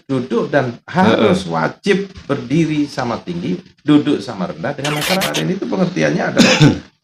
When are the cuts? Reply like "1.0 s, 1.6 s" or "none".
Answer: 5.3 s